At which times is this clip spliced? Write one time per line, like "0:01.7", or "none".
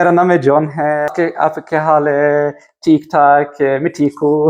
0:01.1

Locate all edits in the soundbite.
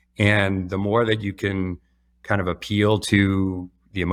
none

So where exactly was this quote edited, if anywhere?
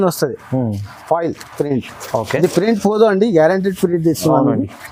none

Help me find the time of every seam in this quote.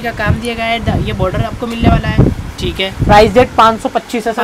none

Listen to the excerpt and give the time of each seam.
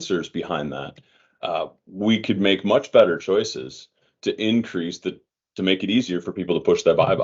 none

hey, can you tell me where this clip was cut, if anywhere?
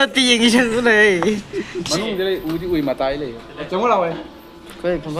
0:01.8

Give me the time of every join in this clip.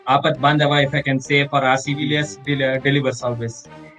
0:02.0

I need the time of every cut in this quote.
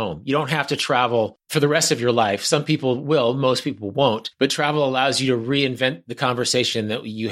0:01.4
0:04.3

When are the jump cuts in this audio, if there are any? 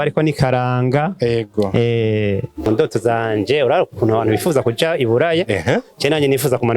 0:02.7

